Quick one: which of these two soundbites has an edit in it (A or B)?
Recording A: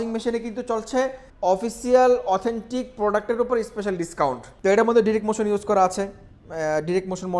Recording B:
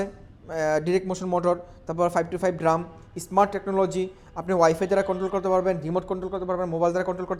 A